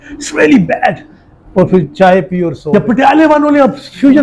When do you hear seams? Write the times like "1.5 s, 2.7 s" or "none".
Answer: 2.6 s